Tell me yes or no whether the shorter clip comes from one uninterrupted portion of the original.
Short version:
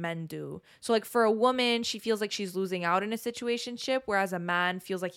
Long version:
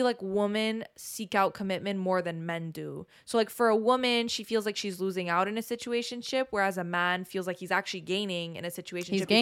yes